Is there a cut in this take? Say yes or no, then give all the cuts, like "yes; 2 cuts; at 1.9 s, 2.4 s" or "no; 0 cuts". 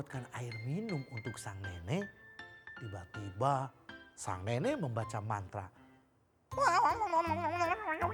no; 0 cuts